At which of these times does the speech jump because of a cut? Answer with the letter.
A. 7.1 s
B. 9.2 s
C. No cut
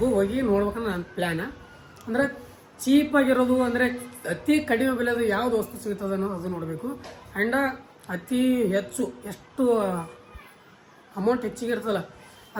C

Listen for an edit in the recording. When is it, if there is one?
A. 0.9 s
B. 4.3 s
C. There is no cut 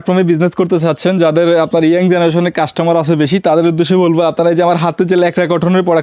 C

